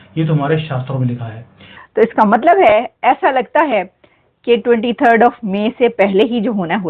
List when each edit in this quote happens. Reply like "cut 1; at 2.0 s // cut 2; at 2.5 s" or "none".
cut 1; at 1.8 s

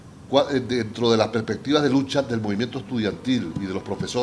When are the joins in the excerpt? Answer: cut 1; at 2.8 s

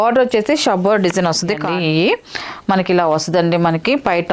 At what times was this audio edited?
cut 1; at 1.7 s

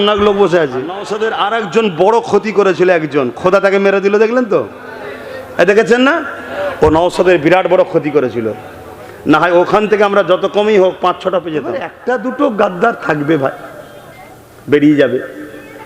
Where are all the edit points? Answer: cut 1; at 1.1 s // cut 2; at 11.9 s

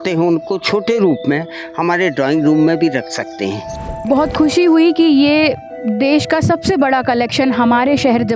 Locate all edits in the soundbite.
cut 1; at 4.0 s

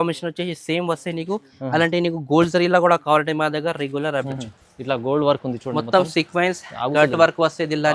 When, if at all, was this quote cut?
cut 1; at 4.2 s

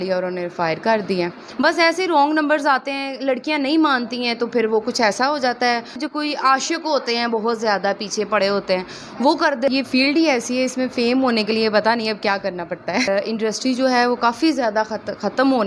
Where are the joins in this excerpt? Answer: cut 1; at 1.4 s // cut 2; at 6.0 s // cut 3; at 9.7 s // cut 4; at 13.1 s

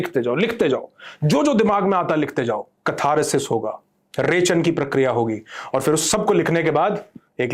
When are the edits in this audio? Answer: none

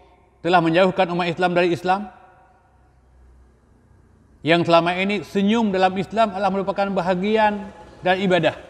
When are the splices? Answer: none

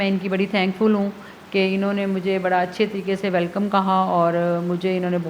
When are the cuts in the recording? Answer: none

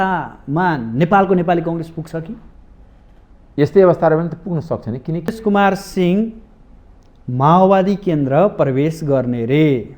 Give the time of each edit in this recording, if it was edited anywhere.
cut 1; at 5.4 s

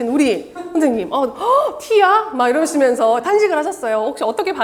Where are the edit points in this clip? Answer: none

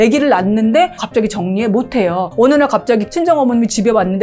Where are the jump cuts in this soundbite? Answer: cut 1; at 1.0 s // cut 2; at 2.3 s // cut 3; at 3.1 s

